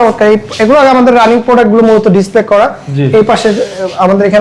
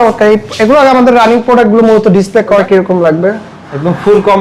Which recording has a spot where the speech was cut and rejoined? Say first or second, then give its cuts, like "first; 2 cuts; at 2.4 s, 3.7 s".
second; 1 cut; at 2.6 s